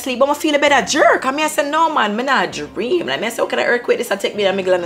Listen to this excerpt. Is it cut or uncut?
uncut